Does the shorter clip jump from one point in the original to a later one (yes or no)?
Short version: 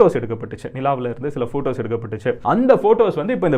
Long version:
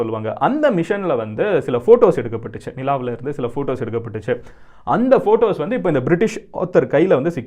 yes